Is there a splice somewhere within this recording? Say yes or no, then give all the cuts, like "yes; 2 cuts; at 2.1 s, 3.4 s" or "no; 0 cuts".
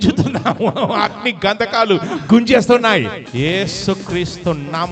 yes; 1 cut; at 3.2 s